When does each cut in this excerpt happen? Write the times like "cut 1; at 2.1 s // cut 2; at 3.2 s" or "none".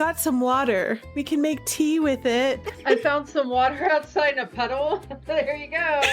cut 1; at 1.1 s // cut 2; at 2.7 s